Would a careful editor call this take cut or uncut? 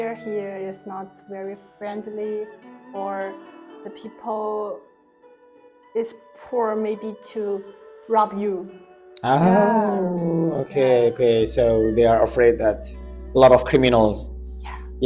uncut